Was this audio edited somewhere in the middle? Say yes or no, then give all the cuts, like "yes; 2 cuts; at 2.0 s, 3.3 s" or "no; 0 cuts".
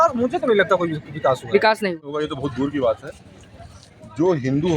yes; 1 cut; at 2.2 s